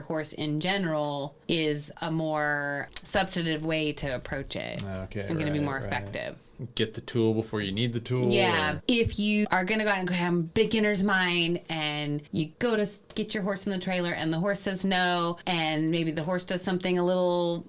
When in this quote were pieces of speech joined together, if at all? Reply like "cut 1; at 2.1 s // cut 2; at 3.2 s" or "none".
none